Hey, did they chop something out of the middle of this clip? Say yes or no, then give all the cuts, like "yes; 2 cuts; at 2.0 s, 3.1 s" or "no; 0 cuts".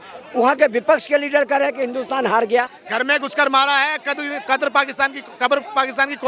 yes; 1 cut; at 2.8 s